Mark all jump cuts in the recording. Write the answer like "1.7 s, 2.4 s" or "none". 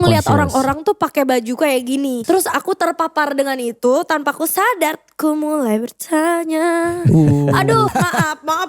2.2 s, 7.9 s

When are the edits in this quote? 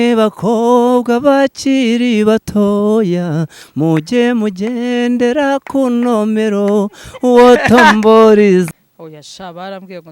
8.7 s

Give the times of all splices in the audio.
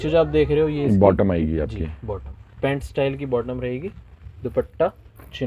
none

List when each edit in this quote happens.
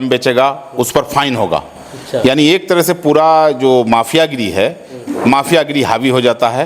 none

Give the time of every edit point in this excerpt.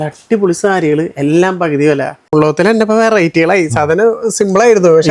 2.3 s

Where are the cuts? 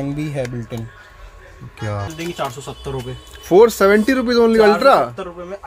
2.1 s

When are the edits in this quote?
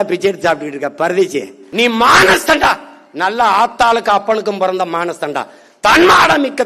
1.6 s

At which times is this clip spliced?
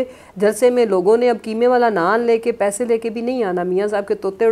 none

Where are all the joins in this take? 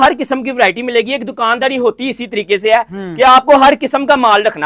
none

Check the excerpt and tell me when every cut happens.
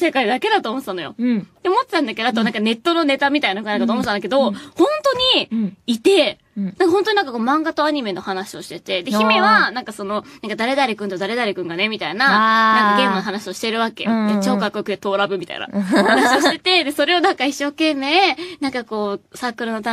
6.7 s

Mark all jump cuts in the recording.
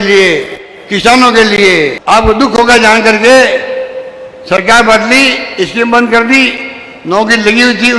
2.0 s

